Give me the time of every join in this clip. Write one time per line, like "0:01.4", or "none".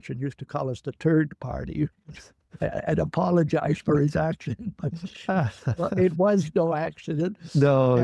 none